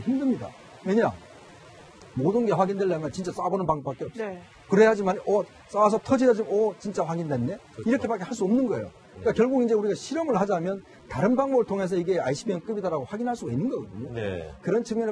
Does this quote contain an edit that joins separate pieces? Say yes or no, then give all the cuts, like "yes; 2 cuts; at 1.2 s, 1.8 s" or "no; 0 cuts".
yes; 1 cut; at 6.4 s